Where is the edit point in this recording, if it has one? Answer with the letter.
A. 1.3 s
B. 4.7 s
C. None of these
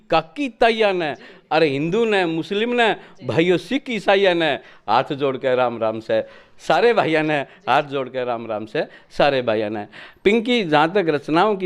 C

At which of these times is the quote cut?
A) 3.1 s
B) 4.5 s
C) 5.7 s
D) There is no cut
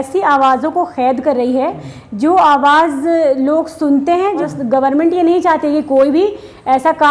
B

